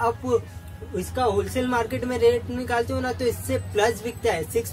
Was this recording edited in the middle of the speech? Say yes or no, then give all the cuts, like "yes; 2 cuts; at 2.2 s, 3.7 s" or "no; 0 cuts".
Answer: no; 0 cuts